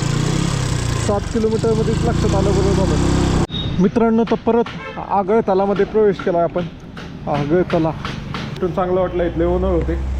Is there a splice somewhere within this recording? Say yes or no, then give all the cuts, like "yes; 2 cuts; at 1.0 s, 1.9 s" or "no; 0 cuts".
yes; 2 cuts; at 3.5 s, 8.6 s